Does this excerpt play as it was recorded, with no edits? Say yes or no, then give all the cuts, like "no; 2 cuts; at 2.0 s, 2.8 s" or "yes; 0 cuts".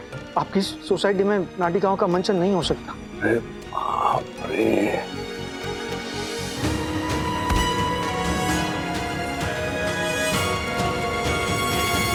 yes; 0 cuts